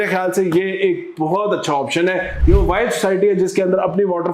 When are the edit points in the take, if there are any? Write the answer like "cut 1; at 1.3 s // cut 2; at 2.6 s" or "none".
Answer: cut 1; at 2.3 s